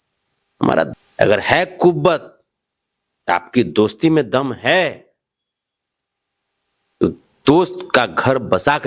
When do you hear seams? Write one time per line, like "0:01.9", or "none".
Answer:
0:01.0